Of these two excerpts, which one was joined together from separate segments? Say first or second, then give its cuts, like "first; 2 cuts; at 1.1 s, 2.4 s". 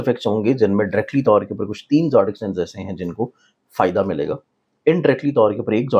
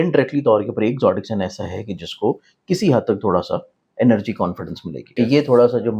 second; 1 cut; at 5.0 s